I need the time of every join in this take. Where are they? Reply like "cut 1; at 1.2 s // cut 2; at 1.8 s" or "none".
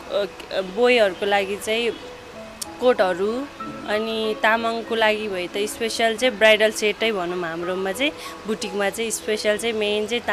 none